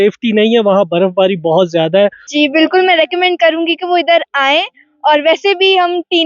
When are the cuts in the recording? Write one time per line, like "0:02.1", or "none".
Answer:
0:02.2

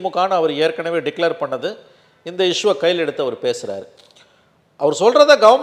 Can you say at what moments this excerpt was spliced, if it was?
none

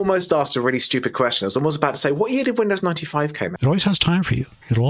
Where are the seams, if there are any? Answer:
0:03.5

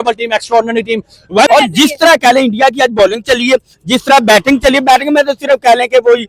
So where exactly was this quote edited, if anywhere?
0:01.5

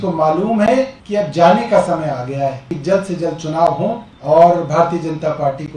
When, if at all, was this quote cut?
0:01.0
0:02.7
0:04.1

